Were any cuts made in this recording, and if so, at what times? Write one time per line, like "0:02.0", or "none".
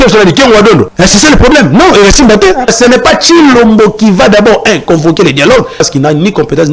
0:00.9
0:02.7
0:05.8